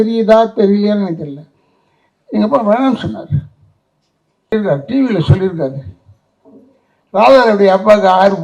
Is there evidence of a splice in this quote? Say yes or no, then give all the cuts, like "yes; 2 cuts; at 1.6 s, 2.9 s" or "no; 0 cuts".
yes; 1 cut; at 4.5 s